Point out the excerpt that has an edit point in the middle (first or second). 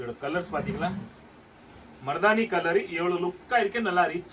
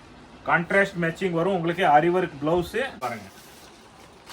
second